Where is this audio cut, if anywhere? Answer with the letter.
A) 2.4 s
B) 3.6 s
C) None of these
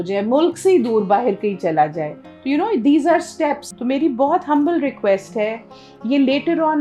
C